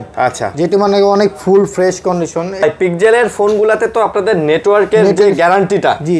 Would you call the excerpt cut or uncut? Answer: cut